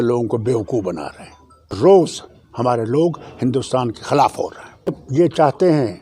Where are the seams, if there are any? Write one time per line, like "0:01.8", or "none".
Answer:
0:01.8
0:05.0